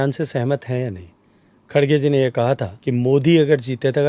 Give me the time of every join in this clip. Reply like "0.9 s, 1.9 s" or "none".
2.7 s